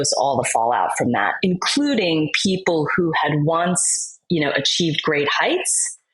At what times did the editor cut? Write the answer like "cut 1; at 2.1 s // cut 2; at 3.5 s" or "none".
none

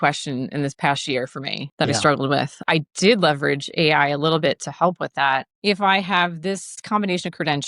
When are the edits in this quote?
cut 1; at 1.6 s // cut 2; at 2.6 s // cut 3; at 5.5 s

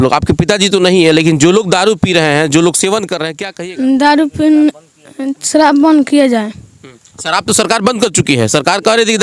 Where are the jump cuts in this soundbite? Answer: cut 1; at 3.4 s

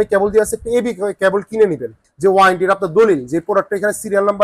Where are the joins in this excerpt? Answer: cut 1; at 2.0 s

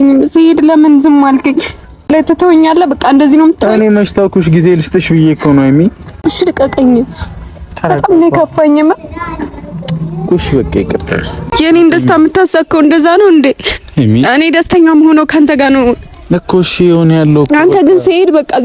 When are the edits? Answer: cut 1; at 2.1 s // cut 2; at 6.1 s // cut 3; at 11.5 s

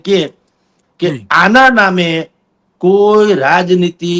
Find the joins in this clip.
none

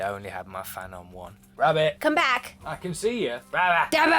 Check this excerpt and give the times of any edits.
cut 1; at 1.5 s

